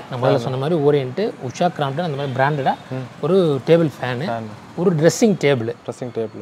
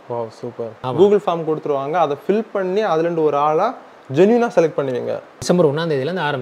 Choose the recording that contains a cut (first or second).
second